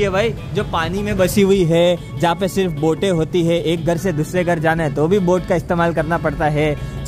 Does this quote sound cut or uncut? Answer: uncut